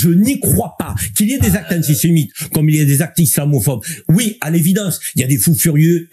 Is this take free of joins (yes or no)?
yes